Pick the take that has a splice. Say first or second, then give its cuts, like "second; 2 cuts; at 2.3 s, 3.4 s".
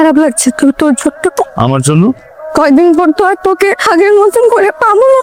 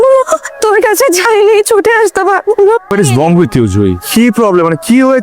second; 1 cut; at 2.9 s